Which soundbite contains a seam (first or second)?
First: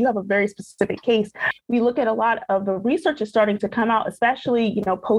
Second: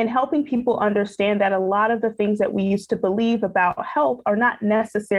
first